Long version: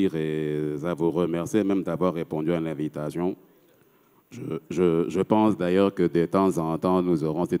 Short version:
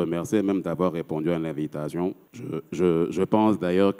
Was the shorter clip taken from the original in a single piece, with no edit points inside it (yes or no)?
no